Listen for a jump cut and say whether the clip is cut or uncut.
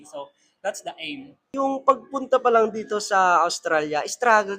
cut